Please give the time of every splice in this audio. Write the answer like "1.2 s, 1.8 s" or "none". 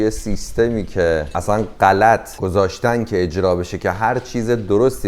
1.3 s, 2.3 s